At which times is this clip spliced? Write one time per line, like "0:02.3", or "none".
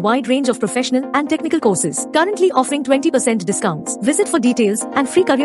none